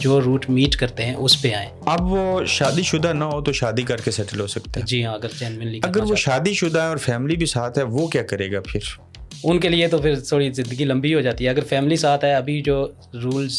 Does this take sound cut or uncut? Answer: cut